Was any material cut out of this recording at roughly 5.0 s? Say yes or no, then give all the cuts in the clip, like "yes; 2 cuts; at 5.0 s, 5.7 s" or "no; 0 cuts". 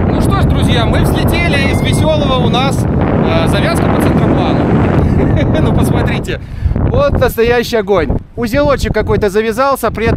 yes; 1 cut; at 5.0 s